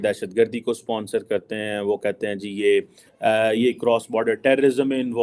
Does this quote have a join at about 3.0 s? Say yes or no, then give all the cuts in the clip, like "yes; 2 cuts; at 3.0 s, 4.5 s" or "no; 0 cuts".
yes; 1 cut; at 3.0 s